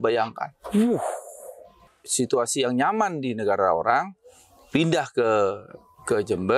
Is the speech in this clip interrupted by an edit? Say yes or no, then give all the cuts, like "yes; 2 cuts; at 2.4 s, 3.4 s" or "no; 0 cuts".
yes; 1 cut; at 2.0 s